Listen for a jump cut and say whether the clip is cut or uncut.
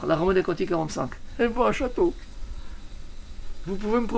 uncut